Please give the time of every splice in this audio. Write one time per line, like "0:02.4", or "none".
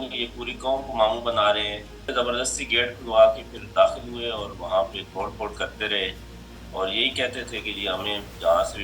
0:02.1